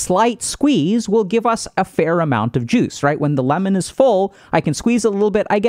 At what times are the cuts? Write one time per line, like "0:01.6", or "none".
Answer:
none